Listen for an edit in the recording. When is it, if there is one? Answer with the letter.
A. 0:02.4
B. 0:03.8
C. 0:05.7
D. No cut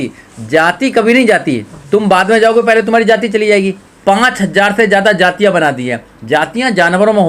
B